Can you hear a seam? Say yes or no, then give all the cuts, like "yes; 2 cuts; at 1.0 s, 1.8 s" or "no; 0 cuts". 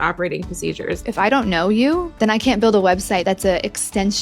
yes; 3 cuts; at 1.1 s, 2.1 s, 3.2 s